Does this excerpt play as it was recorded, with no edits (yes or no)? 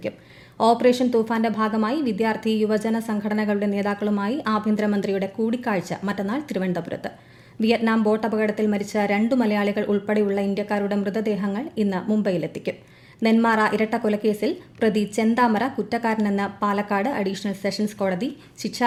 yes